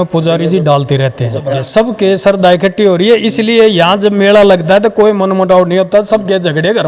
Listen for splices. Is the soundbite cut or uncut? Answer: cut